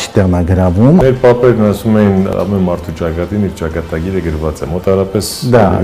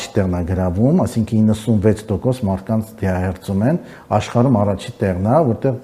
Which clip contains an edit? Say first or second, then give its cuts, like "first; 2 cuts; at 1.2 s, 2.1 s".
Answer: first; 2 cuts; at 1.0 s, 2.3 s